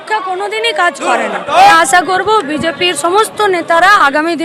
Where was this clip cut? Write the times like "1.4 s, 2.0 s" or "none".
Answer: 1.7 s